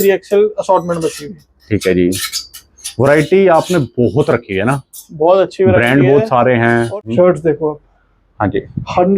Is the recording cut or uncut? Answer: cut